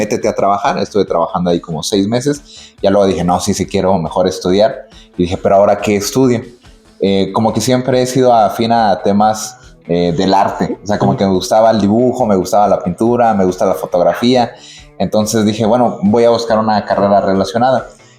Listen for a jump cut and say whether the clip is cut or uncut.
uncut